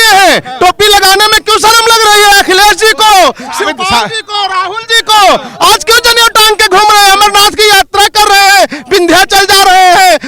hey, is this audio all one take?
yes; 0 cuts

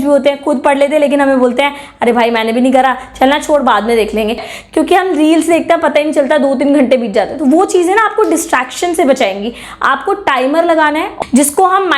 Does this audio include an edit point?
yes; 2 cuts; at 4.3 s, 11.1 s

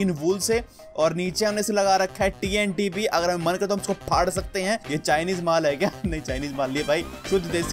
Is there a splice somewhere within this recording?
yes; 1 cut; at 4.8 s

